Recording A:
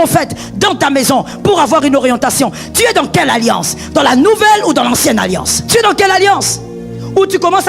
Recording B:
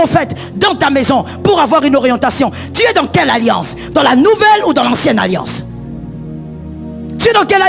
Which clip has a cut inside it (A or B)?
A